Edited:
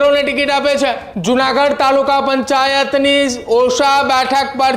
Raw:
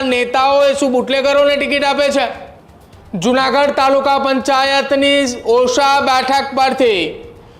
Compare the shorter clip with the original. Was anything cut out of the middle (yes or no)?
yes